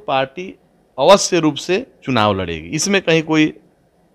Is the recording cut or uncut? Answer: uncut